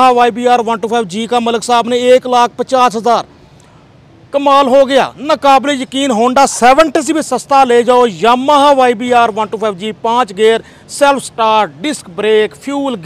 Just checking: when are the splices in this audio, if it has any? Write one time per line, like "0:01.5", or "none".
none

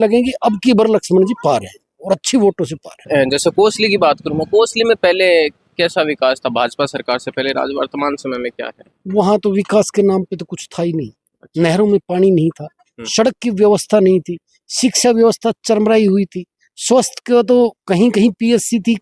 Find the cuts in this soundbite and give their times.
0:03.0

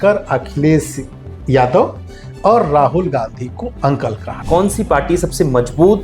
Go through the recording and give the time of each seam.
0:04.3

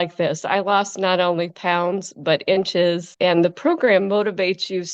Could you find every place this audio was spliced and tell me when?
0:03.1

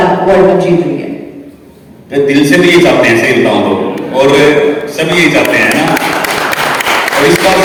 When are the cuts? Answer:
none

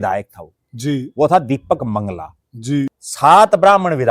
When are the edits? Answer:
0:03.0

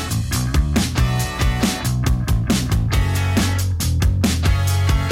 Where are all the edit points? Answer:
0:02.0

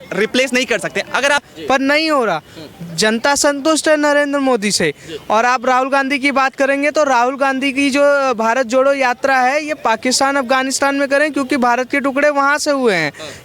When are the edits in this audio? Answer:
0:01.4

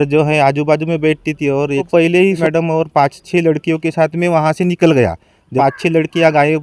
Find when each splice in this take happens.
0:01.9
0:05.5

